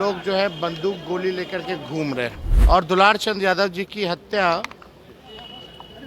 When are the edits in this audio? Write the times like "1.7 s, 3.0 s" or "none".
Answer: 2.5 s